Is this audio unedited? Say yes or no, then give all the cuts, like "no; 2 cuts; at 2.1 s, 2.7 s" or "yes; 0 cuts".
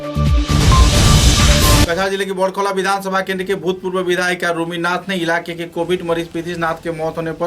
no; 1 cut; at 1.8 s